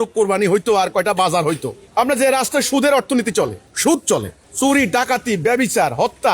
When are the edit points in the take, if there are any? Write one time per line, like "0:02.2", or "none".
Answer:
0:01.7
0:03.6
0:04.4